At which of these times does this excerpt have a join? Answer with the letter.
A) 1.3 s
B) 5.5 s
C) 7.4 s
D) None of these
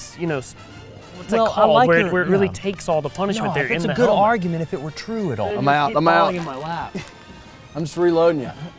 B